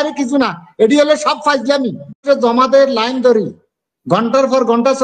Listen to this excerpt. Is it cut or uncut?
cut